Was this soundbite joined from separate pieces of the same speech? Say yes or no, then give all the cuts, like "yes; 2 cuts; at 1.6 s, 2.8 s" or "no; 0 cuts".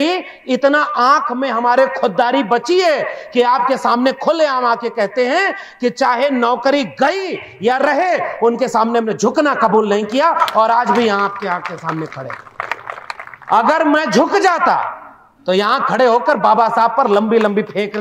no; 0 cuts